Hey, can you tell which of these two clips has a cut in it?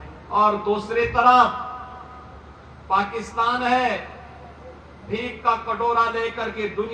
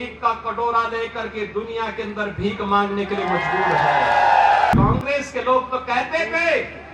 second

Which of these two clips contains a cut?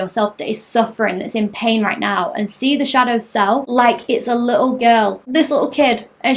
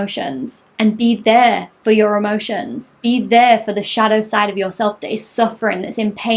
first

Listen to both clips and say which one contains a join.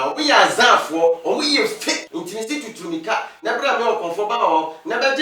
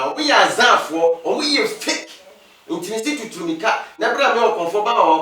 first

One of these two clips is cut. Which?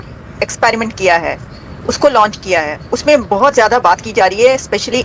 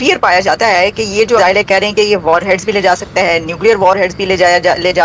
second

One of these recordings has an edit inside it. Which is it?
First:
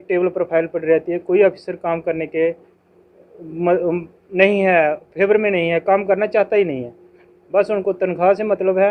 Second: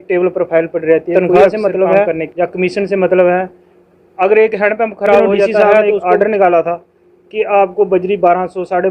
second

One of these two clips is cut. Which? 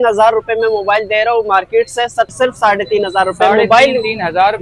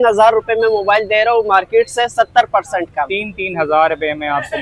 first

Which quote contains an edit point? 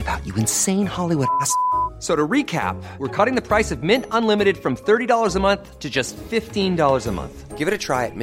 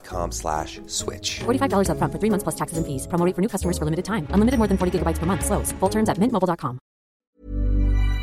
second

